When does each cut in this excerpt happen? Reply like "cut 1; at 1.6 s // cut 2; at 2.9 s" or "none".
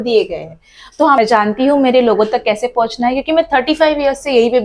cut 1; at 1.2 s

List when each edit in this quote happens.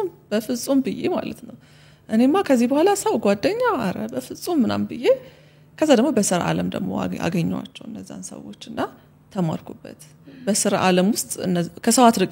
none

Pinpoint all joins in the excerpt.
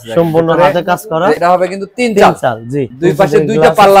cut 1; at 1.4 s // cut 2; at 2.9 s

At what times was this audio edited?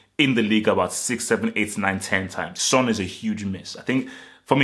cut 1; at 2.6 s

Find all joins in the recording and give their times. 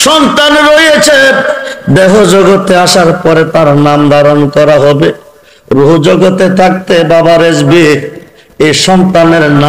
none

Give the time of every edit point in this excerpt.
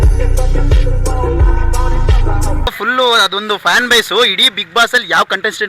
cut 1; at 1.5 s // cut 2; at 2.7 s

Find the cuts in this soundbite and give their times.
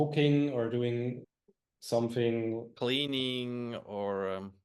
cut 1; at 1.2 s

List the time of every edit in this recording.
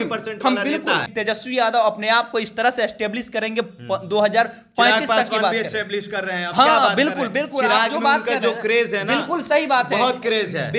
cut 1; at 1.1 s

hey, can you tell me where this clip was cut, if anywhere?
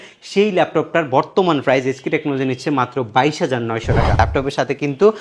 cut 1; at 4.2 s

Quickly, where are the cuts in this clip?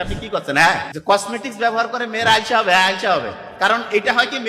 cut 1; at 0.9 s

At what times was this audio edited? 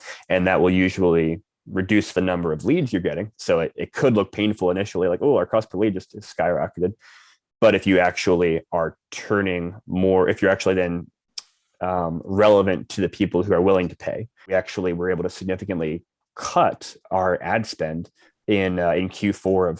cut 1; at 14.4 s

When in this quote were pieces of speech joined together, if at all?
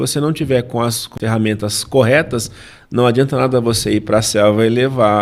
cut 1; at 1.1 s

